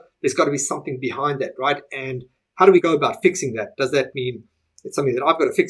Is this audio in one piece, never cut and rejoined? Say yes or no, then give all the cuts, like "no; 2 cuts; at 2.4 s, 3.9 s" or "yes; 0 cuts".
no; 1 cut; at 2.8 s